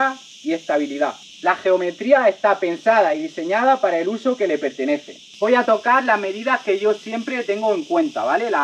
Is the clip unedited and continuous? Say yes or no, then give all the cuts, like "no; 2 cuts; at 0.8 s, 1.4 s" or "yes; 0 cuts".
no; 2 cuts; at 1.2 s, 5.3 s